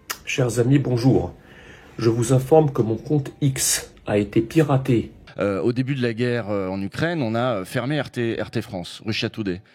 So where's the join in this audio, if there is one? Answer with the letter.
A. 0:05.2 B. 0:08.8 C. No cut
A